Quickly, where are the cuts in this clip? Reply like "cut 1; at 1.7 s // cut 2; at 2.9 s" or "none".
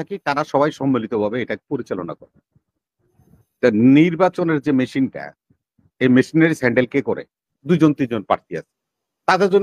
cut 1; at 7.5 s